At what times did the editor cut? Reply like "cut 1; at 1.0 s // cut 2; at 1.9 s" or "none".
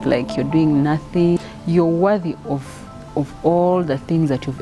cut 1; at 1.4 s